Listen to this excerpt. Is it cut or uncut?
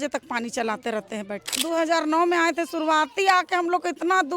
cut